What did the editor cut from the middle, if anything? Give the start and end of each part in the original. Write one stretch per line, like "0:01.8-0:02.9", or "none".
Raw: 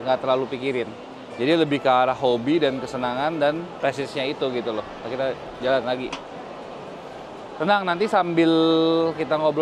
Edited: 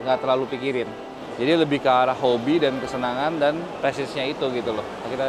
none